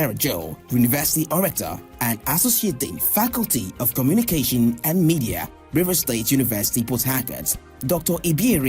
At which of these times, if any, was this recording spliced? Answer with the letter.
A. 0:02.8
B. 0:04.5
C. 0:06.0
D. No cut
A